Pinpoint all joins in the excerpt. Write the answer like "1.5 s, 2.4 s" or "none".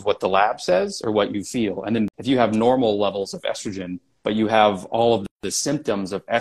2.1 s